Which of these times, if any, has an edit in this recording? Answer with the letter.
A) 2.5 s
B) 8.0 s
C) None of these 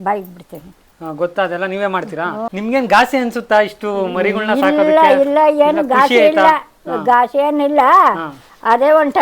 A